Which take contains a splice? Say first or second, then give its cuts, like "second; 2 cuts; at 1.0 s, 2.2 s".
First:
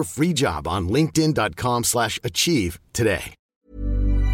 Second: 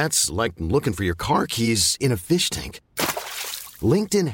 first; 1 cut; at 3.4 s